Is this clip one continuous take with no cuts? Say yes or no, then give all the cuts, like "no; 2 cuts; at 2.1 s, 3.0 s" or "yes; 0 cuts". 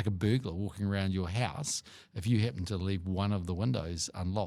yes; 0 cuts